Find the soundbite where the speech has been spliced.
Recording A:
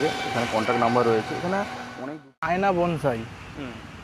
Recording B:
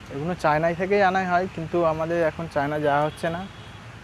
A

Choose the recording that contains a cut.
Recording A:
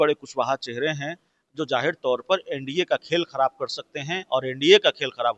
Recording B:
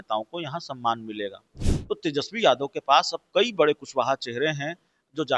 B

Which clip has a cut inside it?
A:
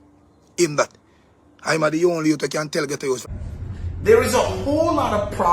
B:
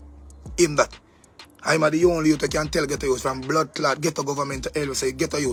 A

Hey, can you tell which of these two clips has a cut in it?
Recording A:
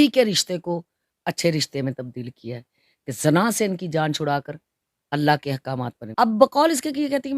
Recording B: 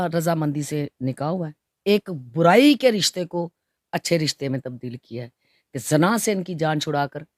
A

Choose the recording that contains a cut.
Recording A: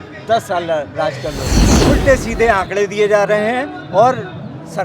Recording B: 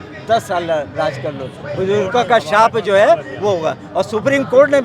A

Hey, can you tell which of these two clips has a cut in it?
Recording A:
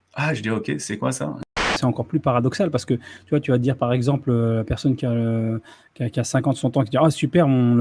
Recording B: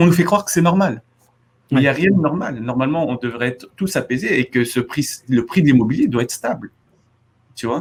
A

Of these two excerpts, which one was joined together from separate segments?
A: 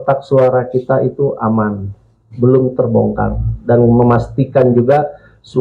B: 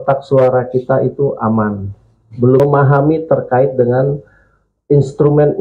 B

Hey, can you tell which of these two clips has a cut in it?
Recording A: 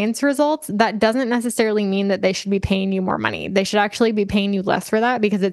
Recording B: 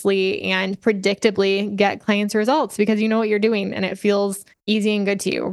B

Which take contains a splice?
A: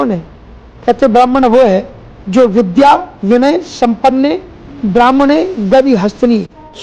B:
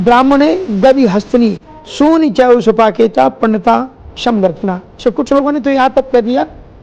B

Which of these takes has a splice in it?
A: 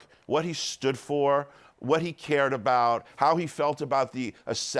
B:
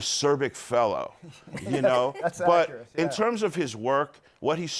A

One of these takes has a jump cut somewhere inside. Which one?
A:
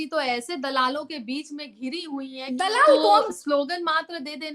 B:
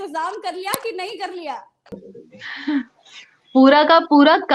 A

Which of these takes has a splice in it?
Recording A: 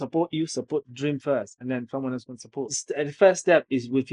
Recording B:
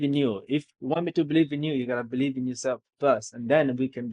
A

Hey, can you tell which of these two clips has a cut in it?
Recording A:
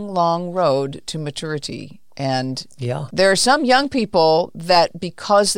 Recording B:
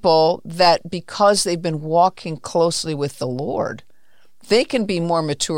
A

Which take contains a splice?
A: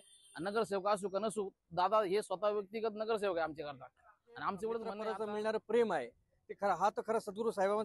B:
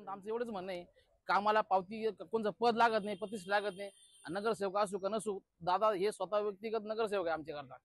A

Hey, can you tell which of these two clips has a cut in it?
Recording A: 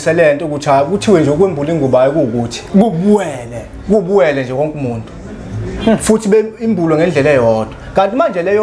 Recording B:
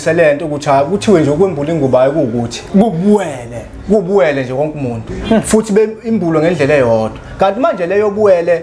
B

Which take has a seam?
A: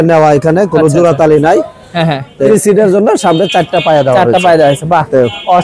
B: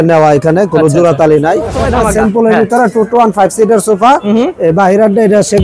B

